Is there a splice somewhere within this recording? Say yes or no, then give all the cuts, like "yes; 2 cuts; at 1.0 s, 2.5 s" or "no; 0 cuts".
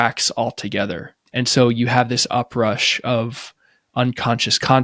yes; 1 cut; at 1.1 s